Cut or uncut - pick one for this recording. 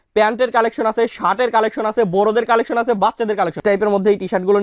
cut